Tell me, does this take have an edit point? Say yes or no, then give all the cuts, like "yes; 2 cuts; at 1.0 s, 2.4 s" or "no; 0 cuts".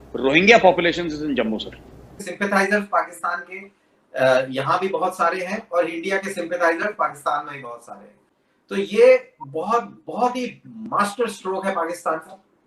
yes; 2 cuts; at 2.3 s, 8.4 s